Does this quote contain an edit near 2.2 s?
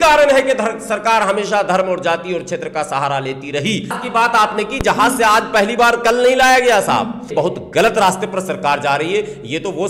no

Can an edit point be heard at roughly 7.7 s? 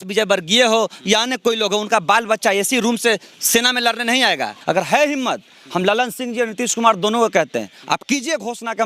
no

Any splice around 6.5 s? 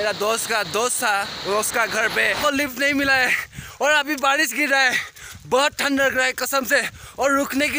no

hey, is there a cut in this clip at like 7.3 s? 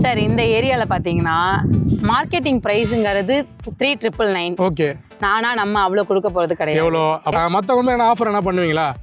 yes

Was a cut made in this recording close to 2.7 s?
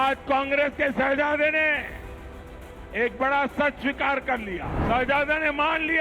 no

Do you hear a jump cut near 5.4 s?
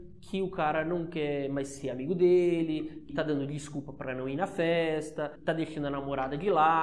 yes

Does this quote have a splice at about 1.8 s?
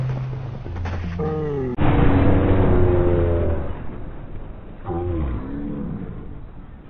yes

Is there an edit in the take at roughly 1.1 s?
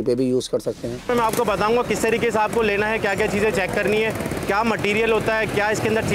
yes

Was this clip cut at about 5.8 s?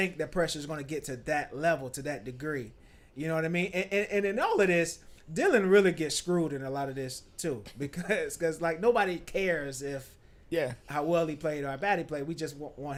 no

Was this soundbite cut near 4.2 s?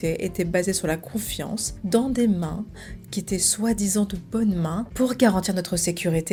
no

